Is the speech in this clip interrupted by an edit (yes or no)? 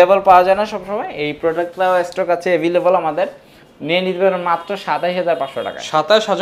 no